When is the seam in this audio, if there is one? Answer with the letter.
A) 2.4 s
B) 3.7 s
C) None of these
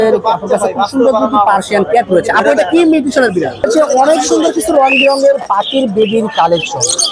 B